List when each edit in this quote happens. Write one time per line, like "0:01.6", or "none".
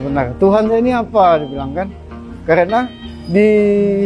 none

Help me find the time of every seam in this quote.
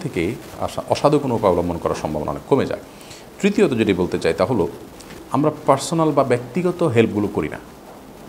none

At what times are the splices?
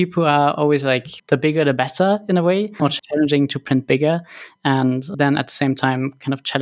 0:01.1
0:02.9

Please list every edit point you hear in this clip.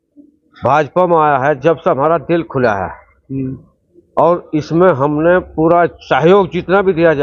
none

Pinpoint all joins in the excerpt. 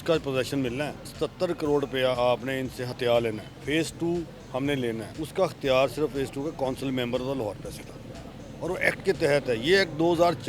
0:01.1
0:03.5
0:05.1

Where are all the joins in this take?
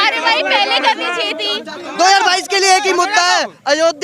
0:01.9

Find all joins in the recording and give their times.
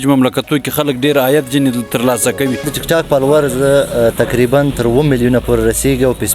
0:02.7

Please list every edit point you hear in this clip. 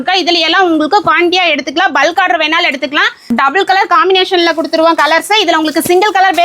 0:03.3

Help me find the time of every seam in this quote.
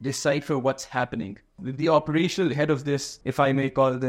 0:01.6
0:03.2

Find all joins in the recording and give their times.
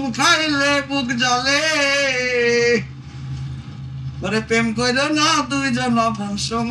none

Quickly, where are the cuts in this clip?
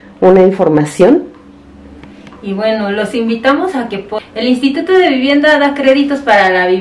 0:04.1

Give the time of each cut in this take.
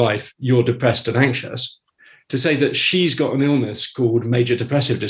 none

